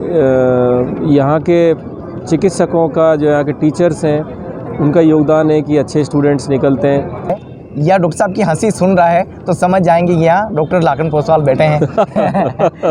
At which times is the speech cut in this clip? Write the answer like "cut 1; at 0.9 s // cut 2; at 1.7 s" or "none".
cut 1; at 7.4 s